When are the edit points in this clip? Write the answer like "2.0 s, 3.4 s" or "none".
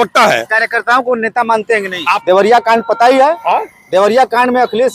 2.1 s